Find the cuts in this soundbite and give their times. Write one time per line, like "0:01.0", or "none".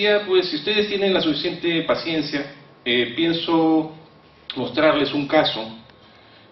0:01.6